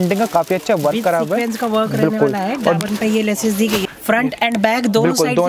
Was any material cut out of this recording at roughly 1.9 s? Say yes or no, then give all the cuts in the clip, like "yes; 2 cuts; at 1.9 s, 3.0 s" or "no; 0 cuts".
no; 1 cut; at 3.9 s